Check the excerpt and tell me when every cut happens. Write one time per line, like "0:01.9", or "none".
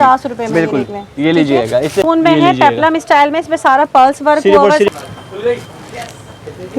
0:02.0
0:04.9